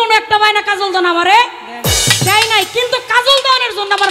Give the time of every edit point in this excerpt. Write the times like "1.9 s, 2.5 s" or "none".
none